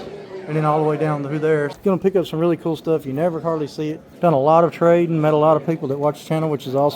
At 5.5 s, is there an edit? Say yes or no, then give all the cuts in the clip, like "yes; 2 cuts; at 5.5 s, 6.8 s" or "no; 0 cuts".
no; 2 cuts; at 1.7 s, 4.0 s